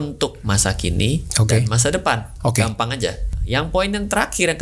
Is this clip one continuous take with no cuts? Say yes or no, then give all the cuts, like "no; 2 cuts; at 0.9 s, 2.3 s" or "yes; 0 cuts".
no; 1 cut; at 3.3 s